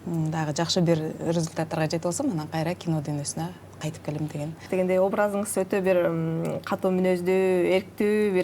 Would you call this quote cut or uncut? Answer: cut